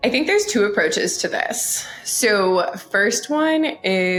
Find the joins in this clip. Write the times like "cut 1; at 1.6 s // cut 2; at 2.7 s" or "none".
none